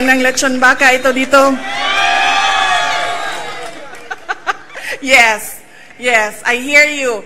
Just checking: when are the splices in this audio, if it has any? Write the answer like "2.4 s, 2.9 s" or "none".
4.0 s